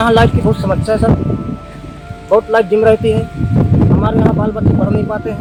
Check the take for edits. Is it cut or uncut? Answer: uncut